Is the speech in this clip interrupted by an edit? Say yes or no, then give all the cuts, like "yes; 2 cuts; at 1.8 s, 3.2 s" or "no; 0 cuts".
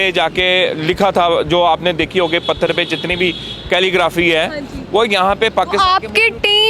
no; 0 cuts